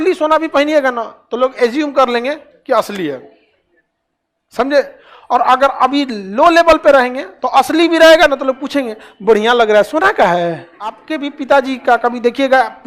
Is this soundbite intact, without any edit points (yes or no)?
no